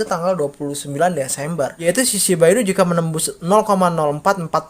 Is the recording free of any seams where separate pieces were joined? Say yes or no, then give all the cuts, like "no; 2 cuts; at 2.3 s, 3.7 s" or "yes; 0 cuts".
no; 1 cut; at 1.8 s